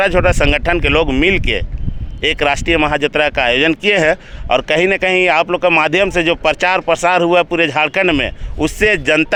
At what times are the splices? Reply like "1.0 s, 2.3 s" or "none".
none